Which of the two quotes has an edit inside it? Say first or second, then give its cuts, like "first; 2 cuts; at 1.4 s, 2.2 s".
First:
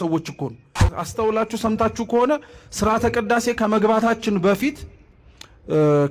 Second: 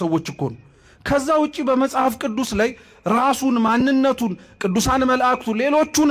first; 1 cut; at 0.9 s